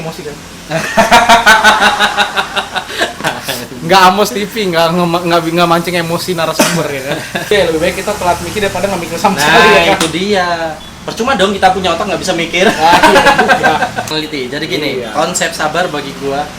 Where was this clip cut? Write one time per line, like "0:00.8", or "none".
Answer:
0:07.5
0:14.1